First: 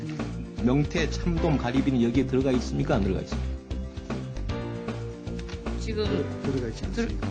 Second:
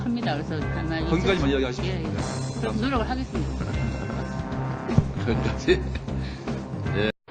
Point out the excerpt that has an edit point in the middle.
second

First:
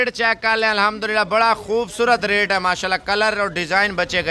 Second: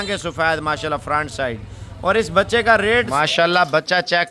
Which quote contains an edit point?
second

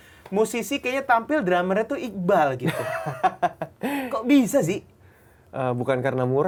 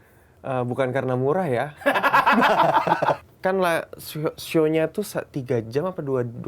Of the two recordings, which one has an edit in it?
second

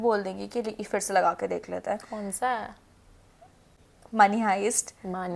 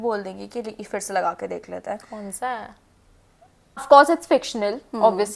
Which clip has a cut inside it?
second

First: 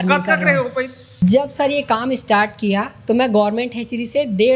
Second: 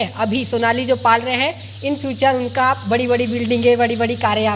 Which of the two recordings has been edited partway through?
first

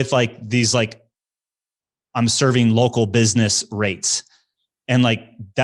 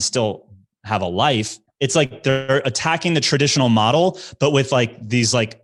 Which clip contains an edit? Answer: second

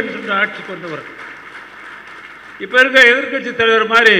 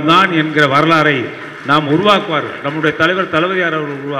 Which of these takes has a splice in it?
first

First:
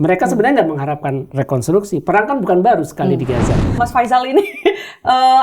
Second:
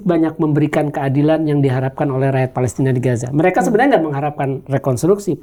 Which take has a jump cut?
first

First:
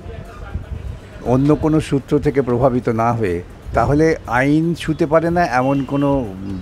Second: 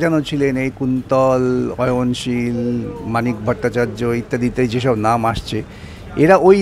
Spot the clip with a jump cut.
first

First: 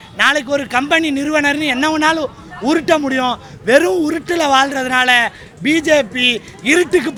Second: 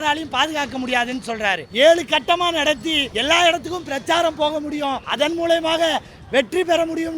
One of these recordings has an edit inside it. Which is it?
second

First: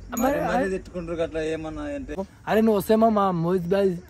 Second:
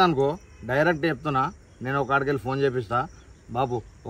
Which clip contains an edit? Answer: first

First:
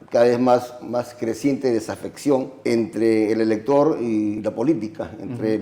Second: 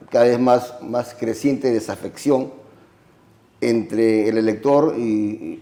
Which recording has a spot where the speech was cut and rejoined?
first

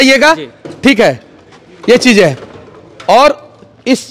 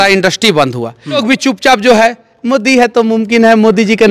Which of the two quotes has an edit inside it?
second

